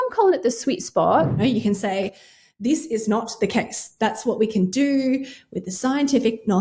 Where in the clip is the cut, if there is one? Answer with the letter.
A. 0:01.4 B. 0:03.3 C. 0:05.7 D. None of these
A